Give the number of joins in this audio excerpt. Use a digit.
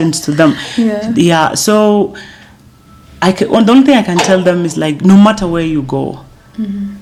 0